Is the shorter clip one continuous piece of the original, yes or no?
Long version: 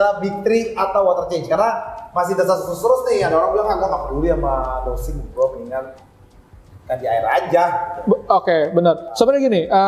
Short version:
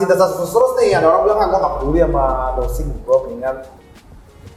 yes